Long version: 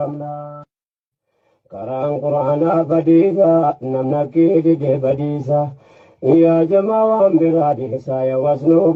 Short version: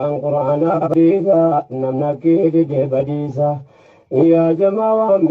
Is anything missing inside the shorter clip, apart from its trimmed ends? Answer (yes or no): yes